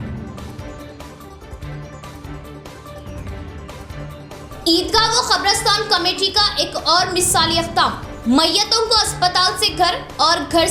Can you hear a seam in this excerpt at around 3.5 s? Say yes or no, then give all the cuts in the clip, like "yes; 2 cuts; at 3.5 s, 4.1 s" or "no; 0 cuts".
yes; 1 cut; at 3.5 s